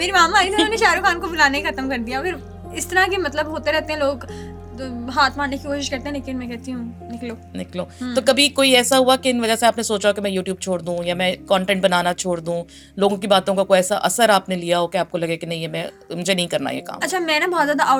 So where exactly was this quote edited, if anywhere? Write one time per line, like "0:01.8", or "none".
none